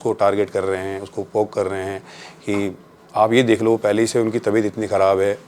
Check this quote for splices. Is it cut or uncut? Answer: uncut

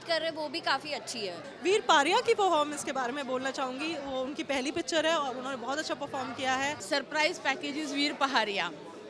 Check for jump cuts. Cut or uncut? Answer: cut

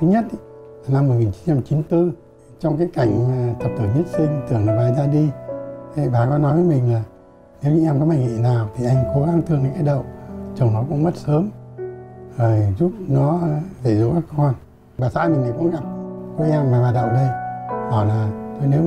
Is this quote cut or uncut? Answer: uncut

